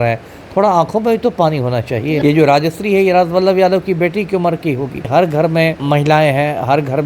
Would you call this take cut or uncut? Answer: cut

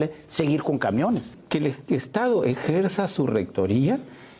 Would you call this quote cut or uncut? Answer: cut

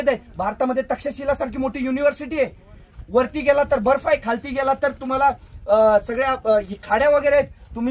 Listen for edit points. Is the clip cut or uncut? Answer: uncut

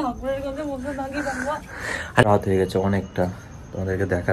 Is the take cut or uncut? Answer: cut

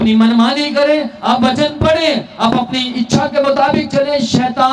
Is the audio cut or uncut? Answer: uncut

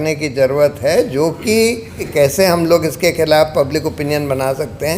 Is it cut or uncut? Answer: cut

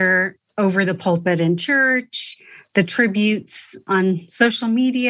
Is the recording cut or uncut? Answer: cut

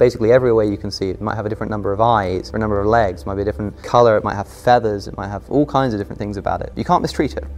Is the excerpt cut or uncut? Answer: cut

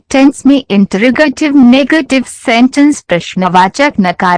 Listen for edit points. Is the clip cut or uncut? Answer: uncut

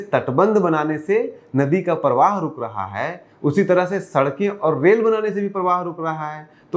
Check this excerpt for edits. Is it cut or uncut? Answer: uncut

